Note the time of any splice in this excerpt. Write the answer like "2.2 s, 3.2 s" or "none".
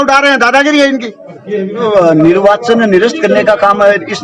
1.8 s